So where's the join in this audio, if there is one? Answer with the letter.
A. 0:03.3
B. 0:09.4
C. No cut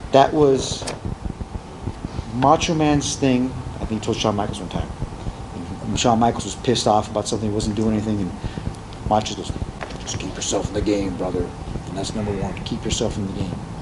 C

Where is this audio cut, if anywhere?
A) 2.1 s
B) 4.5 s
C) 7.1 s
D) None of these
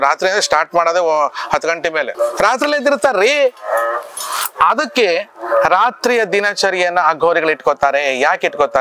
A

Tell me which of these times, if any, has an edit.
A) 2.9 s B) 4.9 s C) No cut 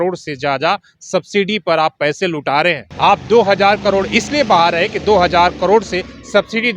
A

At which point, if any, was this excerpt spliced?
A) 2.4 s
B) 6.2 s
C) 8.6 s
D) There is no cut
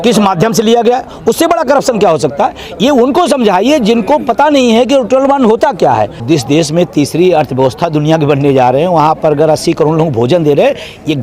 B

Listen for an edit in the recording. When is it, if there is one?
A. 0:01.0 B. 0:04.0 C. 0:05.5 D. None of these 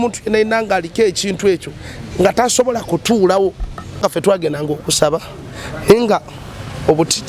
B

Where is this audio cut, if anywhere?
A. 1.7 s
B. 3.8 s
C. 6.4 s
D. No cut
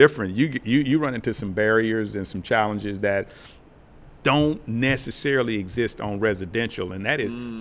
D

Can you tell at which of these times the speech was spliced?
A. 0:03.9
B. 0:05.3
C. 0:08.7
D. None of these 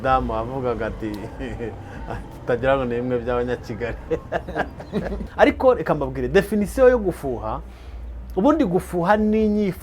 B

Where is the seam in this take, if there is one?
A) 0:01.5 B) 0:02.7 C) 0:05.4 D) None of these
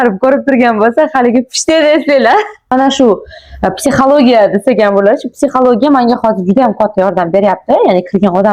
B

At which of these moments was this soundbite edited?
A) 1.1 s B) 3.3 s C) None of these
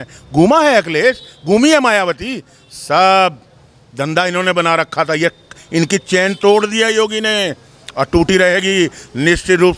C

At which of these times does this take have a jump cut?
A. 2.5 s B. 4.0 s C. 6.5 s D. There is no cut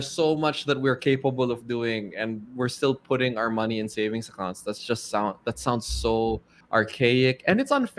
C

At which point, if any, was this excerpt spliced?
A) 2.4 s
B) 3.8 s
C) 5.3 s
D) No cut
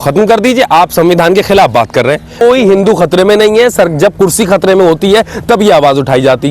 A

